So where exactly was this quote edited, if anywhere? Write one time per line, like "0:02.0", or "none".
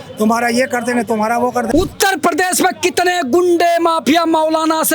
0:01.7